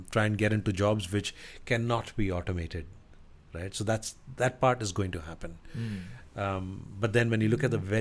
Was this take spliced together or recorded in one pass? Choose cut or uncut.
uncut